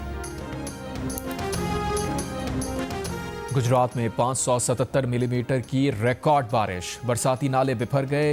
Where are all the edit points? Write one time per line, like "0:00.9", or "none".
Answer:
0:02.0